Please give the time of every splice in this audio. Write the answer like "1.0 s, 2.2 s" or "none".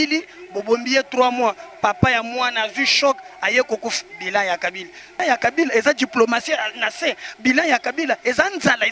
5.2 s